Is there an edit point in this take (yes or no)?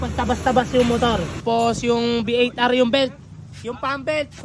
yes